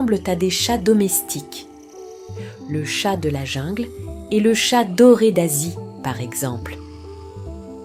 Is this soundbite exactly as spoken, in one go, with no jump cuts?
no; 1 cut; at 6.6 s

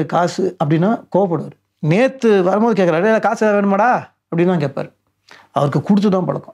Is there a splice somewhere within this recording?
no; 0 cuts

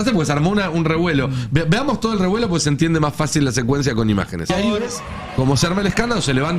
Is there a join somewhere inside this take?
yes; 1 cut; at 4.5 s

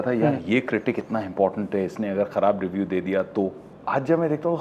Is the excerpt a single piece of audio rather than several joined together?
yes; 0 cuts

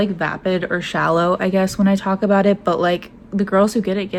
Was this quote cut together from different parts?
no; 0 cuts

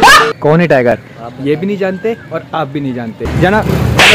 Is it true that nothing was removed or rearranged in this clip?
no; 1 cut; at 3.3 s

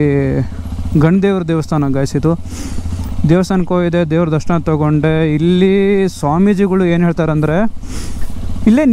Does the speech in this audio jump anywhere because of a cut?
no; 0 cuts

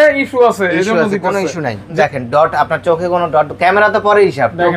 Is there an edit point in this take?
yes; 1 cut; at 1.9 s

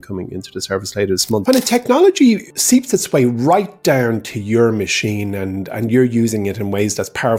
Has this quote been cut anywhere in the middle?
yes; 2 cuts; at 1.4 s, 2.5 s

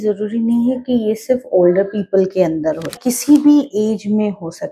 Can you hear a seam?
no; 0 cuts

